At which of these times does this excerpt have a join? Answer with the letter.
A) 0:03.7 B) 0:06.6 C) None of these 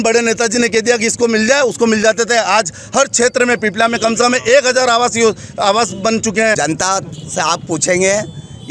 B